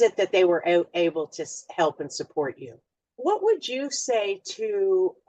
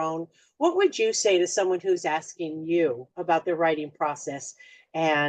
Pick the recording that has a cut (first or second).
first